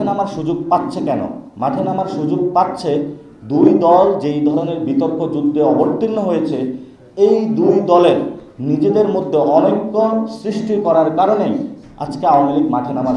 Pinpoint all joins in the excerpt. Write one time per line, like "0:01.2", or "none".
none